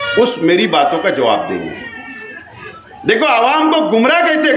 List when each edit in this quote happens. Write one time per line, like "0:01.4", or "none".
none